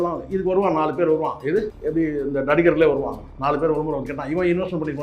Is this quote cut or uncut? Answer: cut